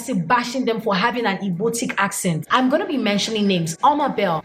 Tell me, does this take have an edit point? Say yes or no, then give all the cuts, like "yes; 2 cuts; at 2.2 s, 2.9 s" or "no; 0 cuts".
yes; 1 cut; at 2.4 s